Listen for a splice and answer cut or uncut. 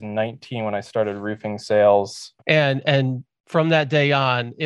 cut